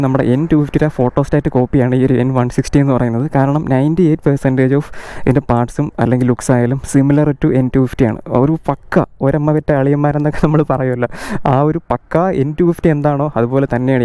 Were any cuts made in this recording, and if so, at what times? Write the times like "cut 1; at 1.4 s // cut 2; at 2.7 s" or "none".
none

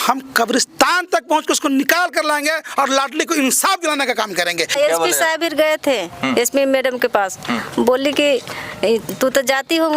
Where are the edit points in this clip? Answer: cut 1; at 4.7 s

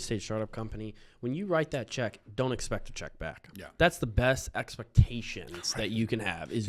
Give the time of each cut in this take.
none

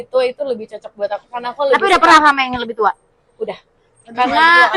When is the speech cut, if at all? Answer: none

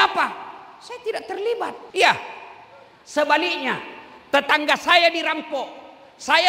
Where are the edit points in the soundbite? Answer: cut 1; at 1.8 s

